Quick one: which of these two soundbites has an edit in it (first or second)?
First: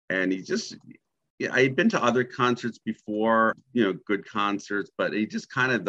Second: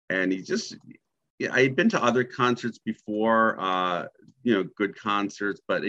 first